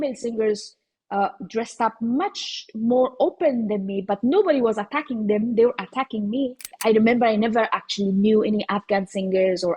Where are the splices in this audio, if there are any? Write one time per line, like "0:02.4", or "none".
0:06.7